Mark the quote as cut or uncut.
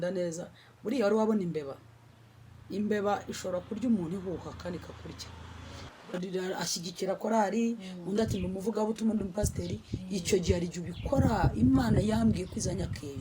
cut